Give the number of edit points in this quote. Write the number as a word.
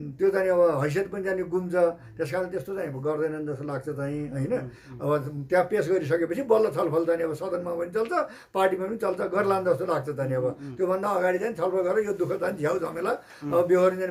zero